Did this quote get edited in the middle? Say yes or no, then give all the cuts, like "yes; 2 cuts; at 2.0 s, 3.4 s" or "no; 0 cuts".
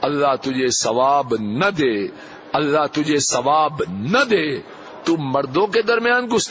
no; 0 cuts